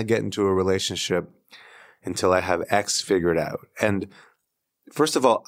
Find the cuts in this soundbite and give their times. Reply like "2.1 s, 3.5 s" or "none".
none